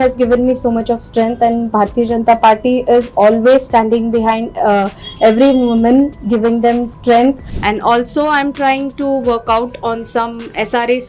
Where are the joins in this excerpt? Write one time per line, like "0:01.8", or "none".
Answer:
0:07.5